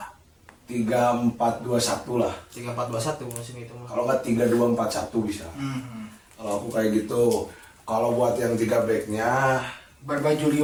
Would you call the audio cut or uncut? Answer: uncut